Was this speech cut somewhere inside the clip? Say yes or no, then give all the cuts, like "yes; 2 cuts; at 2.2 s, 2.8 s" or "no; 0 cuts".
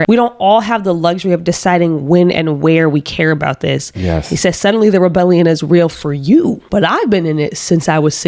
no; 0 cuts